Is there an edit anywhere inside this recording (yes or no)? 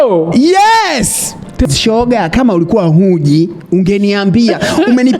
yes